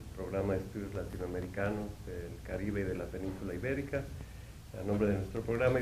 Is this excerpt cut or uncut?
uncut